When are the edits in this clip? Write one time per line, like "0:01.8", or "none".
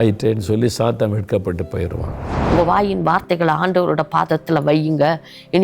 0:02.3